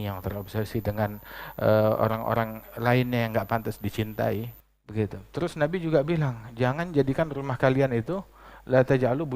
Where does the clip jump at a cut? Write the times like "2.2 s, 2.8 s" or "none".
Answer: 4.5 s

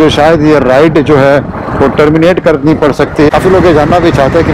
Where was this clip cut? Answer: 3.3 s

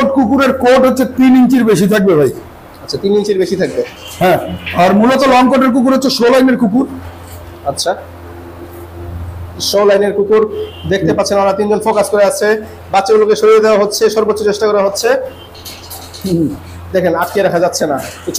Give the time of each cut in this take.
none

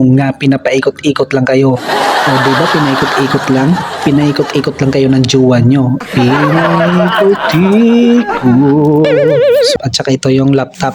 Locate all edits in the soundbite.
9.7 s

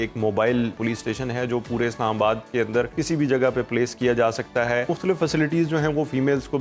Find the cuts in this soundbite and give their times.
0.8 s, 2.9 s, 4.9 s

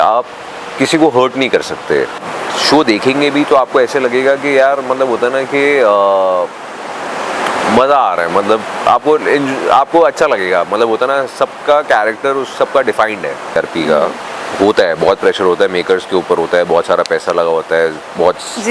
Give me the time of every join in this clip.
2.3 s, 13.6 s

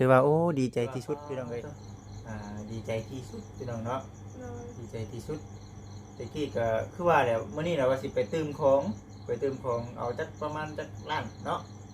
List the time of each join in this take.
1.2 s

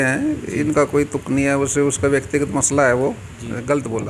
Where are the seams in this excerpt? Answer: none

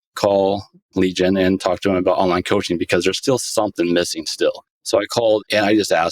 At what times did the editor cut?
3.7 s, 5.4 s

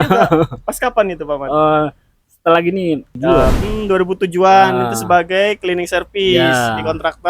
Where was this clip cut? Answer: 3.6 s

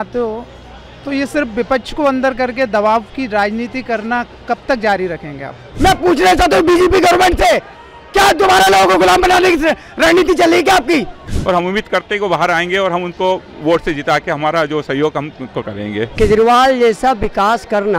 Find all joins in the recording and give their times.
5.7 s, 11.2 s, 16.1 s

